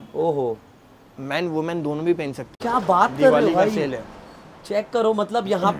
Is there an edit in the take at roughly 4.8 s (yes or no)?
no